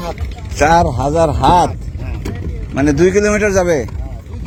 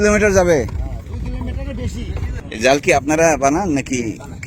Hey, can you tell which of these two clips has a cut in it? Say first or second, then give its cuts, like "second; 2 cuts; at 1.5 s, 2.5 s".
second; 1 cut; at 2.3 s